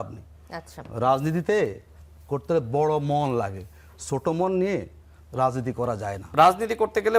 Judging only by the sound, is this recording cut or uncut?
cut